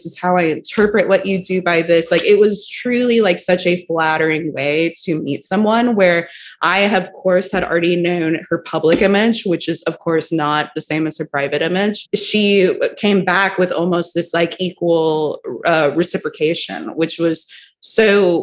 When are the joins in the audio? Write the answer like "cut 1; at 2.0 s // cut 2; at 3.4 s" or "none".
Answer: cut 1; at 12.0 s